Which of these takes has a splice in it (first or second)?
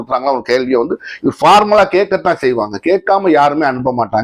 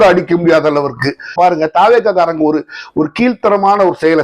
second